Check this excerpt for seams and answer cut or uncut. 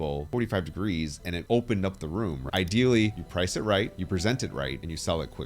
cut